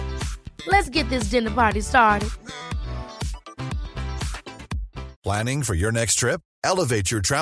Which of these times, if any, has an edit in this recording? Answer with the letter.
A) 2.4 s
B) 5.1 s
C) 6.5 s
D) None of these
B